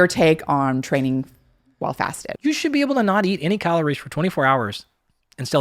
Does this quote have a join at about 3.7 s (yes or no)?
no